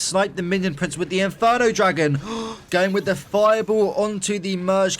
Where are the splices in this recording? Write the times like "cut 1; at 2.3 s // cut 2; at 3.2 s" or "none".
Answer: cut 1; at 2.7 s